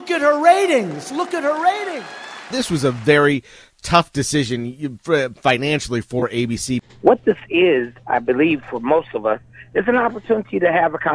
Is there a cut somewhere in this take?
yes; 2 cuts; at 2.5 s, 6.8 s

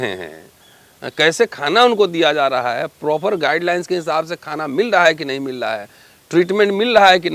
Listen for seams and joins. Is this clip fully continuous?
yes; 0 cuts

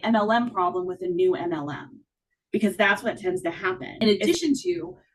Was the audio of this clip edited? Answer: yes; 1 cut; at 3.9 s

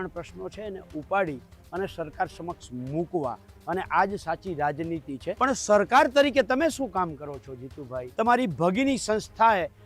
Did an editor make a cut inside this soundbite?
yes; 2 cuts; at 5.3 s, 8.0 s

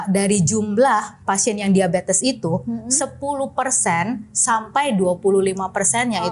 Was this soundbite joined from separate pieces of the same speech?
no; 0 cuts

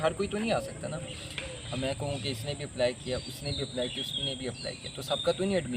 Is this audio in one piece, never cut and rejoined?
yes; 0 cuts

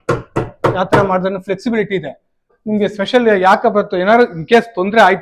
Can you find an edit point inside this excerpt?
yes; 1 cut; at 2.5 s

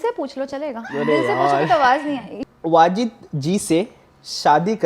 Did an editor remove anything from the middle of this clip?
yes; 1 cut; at 2.3 s

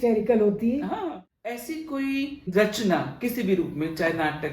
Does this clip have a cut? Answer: yes; 2 cuts; at 1.0 s, 2.5 s

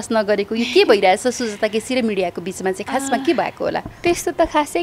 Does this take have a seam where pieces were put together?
no; 0 cuts

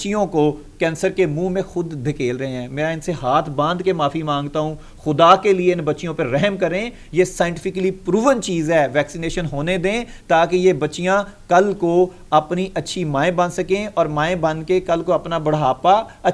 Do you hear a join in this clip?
no; 0 cuts

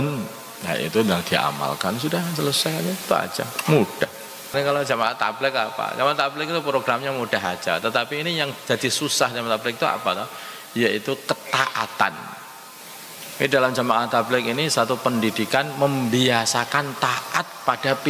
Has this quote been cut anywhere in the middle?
yes; 1 cut; at 4.5 s

